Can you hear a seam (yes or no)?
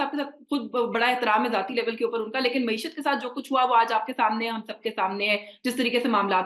no